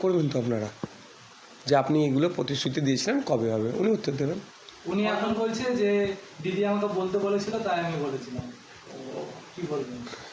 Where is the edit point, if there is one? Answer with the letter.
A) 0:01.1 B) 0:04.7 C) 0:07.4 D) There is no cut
D